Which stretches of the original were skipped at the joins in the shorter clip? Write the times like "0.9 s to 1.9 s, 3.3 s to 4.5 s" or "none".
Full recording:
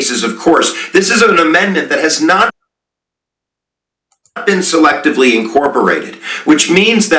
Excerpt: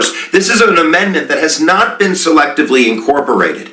2.5 s to 4.4 s